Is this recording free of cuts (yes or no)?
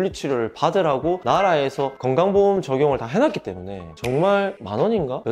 yes